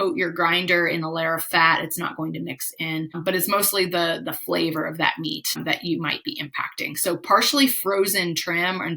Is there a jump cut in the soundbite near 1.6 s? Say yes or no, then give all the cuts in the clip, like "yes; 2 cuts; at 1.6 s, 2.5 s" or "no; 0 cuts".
no; 2 cuts; at 3.2 s, 5.6 s